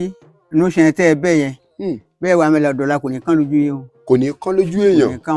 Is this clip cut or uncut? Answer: uncut